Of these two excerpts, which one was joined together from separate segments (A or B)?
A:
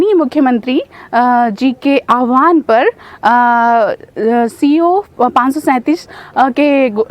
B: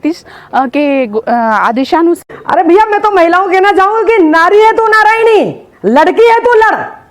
B